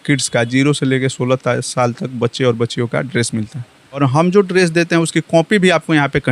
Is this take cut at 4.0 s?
yes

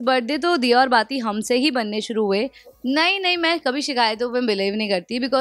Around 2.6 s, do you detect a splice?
yes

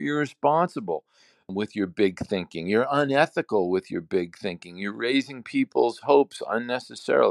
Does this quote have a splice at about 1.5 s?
yes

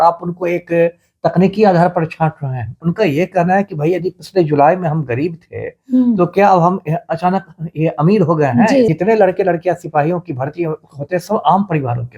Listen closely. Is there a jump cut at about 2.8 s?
yes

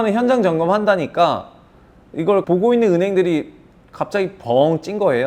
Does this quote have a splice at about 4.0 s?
no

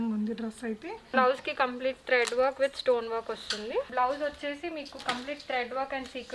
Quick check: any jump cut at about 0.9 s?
yes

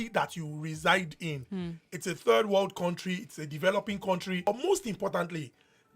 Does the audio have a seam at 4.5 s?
yes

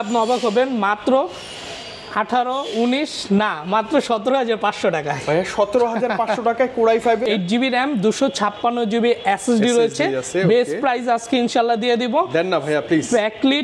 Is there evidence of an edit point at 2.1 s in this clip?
no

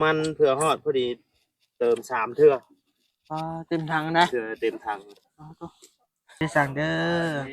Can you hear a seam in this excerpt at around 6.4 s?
yes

